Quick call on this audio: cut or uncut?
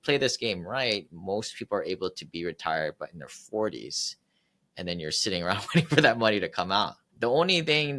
cut